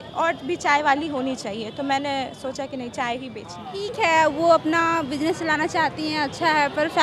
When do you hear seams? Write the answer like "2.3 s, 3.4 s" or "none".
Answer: 3.9 s